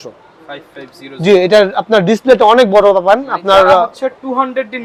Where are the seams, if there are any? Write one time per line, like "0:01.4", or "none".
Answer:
none